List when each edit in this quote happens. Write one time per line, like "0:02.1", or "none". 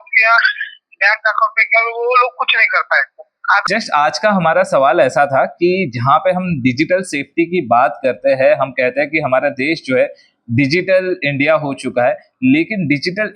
0:03.6